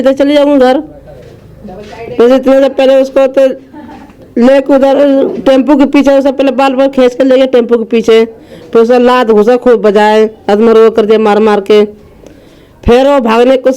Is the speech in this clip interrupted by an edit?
no; 0 cuts

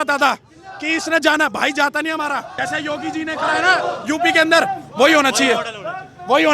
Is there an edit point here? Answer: yes; 1 cut; at 2.6 s

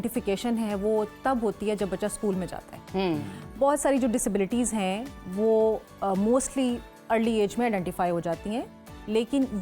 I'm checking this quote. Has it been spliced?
no; 0 cuts

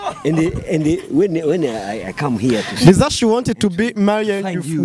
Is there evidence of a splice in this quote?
no; 0 cuts

